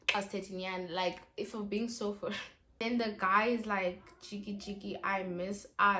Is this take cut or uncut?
cut